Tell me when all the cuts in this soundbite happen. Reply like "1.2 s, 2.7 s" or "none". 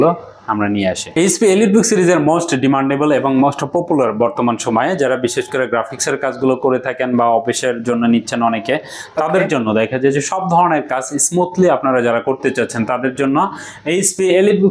none